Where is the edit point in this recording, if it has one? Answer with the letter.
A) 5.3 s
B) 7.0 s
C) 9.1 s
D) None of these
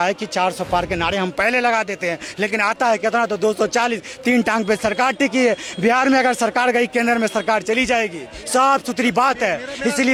D